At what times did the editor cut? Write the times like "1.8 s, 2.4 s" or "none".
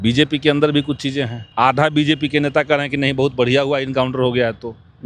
1.4 s